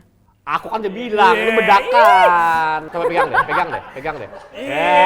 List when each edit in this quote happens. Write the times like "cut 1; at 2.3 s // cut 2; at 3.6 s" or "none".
cut 1; at 2.9 s